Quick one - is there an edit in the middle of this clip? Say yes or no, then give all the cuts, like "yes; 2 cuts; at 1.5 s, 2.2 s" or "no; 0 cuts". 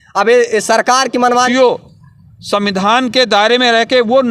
yes; 1 cut; at 1.5 s